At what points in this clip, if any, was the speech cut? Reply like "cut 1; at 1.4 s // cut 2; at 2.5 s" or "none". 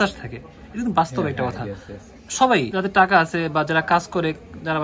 none